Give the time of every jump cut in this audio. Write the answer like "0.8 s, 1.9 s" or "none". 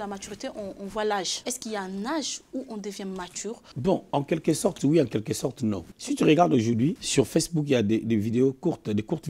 none